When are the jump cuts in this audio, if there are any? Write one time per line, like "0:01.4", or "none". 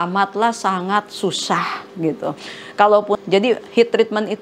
0:03.2